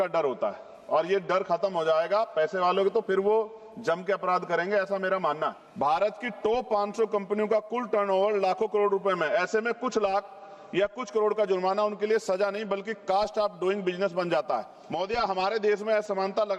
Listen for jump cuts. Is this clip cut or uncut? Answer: cut